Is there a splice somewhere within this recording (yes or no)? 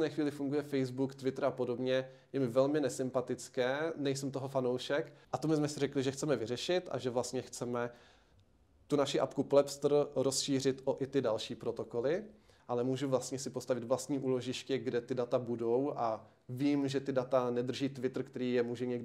yes